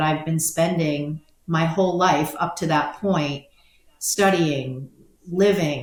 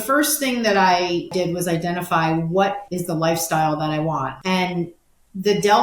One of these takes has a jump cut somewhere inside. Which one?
second; 3 cuts; at 1.3 s, 2.9 s, 4.3 s

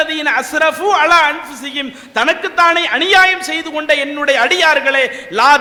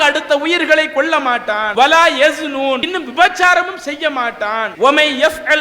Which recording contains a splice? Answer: second; 3 cuts; at 1.7 s, 2.9 s, 4.7 s

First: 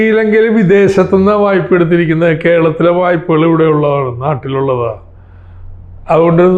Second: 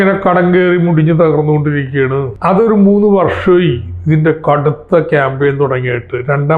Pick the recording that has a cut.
second; 1 cut; at 2.3 s

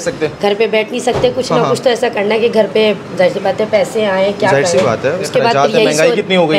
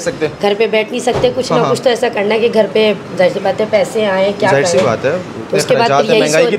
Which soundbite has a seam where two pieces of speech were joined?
first; 1 cut; at 5.2 s

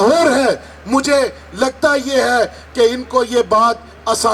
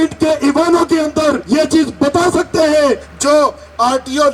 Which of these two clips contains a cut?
second; 2 cuts; at 1.4 s, 3.1 s

